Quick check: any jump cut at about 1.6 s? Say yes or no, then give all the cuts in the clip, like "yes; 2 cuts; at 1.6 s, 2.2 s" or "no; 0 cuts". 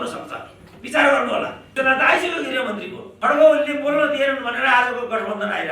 yes; 1 cut; at 1.6 s